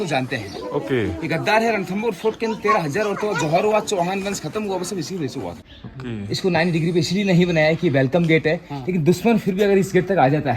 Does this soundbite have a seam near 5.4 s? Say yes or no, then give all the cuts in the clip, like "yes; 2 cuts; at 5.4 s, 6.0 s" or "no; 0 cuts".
yes; 1 cut; at 5.4 s